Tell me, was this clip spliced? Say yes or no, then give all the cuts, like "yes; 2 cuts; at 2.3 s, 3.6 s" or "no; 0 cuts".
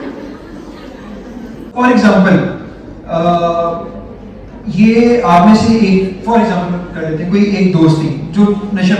yes; 1 cut; at 1.3 s